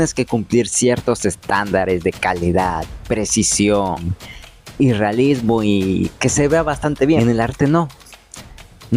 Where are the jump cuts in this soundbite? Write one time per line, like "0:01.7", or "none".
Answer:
0:07.2